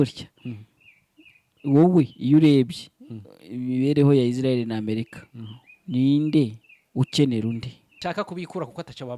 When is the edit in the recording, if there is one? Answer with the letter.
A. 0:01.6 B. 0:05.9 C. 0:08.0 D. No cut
C